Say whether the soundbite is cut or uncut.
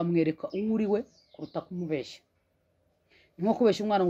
uncut